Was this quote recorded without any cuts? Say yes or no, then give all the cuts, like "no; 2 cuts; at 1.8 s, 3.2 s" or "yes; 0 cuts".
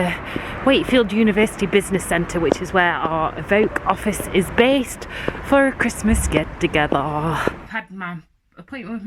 no; 1 cut; at 7.6 s